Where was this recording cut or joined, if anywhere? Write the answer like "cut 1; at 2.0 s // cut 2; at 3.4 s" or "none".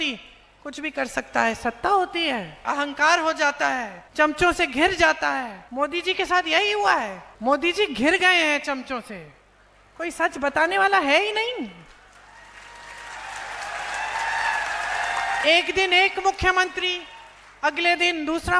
cut 1; at 2.6 s // cut 2; at 4.0 s // cut 3; at 5.6 s // cut 4; at 7.2 s